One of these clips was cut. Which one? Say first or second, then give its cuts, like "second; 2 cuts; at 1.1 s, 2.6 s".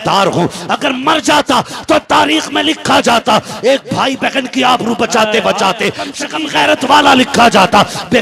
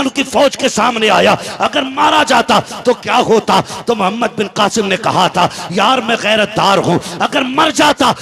first; 1 cut; at 6.2 s